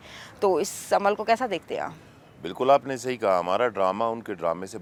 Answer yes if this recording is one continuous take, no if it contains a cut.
yes